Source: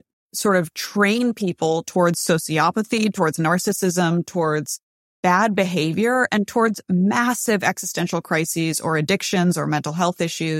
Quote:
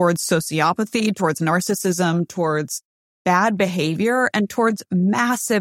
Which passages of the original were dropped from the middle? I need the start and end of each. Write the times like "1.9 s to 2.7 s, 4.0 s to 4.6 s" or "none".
none